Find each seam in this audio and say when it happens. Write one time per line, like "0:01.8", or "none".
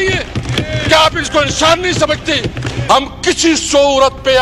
0:02.7